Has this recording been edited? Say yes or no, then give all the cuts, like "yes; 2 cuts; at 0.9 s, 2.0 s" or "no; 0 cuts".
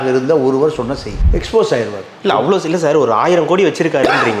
yes; 1 cut; at 1.1 s